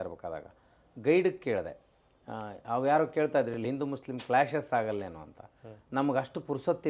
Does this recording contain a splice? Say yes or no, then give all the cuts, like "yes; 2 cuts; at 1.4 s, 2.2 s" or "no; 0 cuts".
no; 0 cuts